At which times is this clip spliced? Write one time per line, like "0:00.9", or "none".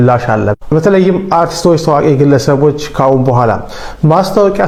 none